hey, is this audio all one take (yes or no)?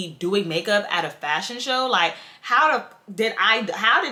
yes